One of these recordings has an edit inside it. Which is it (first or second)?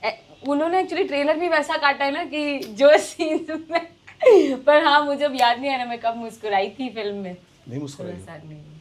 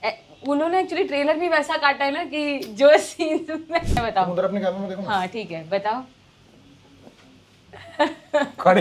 second